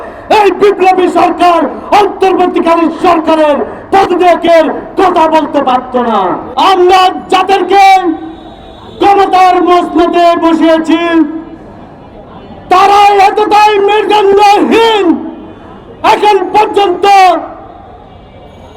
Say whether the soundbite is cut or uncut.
cut